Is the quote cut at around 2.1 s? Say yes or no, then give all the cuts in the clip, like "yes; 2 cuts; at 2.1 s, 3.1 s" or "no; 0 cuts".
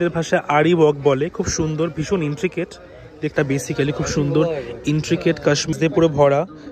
no; 2 cuts; at 3.3 s, 5.7 s